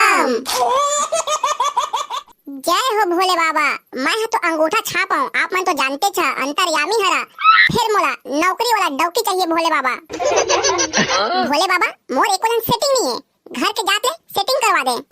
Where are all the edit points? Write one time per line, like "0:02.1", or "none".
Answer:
0:02.2
0:11.2